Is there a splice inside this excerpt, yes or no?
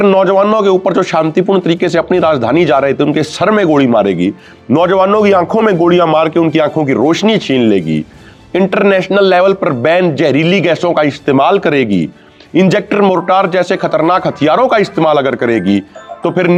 no